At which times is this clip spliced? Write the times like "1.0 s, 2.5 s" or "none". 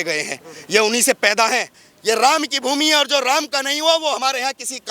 1.8 s